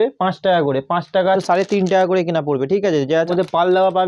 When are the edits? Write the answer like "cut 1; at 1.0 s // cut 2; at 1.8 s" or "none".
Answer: cut 1; at 1.4 s // cut 2; at 3.3 s